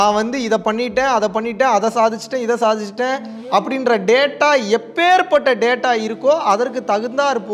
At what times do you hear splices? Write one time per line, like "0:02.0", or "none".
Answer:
none